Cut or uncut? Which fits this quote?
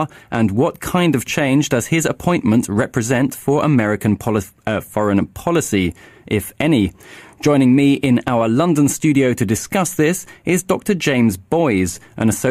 uncut